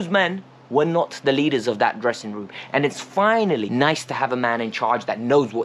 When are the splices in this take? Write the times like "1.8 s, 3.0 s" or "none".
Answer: 3.7 s